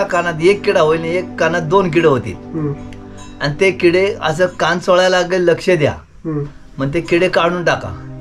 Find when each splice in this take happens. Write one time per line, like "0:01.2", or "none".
none